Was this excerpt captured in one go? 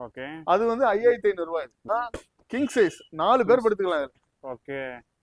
no; 1 cut; at 1.9 s

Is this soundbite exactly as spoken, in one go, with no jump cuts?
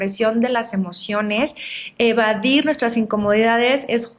yes; 0 cuts

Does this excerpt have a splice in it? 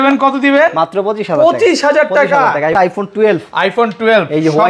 yes; 1 cut; at 2.8 s

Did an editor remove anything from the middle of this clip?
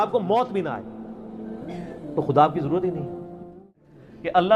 yes; 1 cut; at 3.6 s

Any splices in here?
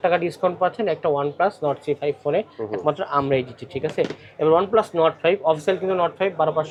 no; 0 cuts

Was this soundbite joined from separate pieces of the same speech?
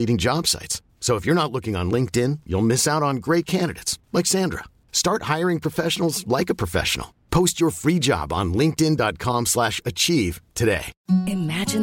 yes; 1 cut; at 10.9 s

